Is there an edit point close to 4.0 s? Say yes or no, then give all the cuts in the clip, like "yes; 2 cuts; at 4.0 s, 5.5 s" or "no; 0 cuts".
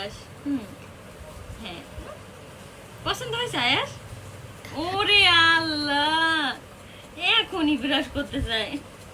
no; 0 cuts